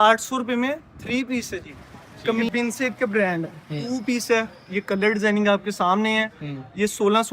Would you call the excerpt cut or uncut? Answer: cut